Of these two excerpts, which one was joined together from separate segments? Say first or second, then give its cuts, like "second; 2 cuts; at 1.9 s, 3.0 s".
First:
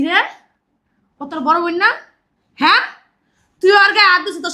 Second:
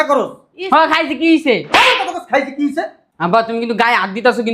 second; 1 cut; at 3.0 s